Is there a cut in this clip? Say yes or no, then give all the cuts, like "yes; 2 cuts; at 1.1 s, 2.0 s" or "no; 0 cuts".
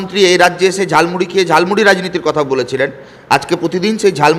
no; 0 cuts